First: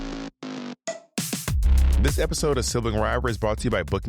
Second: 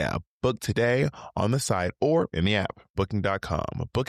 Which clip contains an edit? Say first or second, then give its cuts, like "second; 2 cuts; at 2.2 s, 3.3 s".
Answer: first; 1 cut; at 1.9 s